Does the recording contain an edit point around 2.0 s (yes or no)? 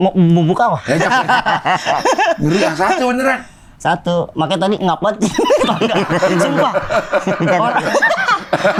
no